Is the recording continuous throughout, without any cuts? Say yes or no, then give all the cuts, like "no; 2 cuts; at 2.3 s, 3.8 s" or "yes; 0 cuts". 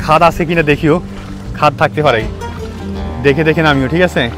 yes; 0 cuts